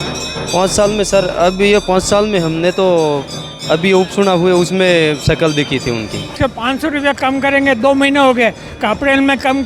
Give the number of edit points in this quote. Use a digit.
1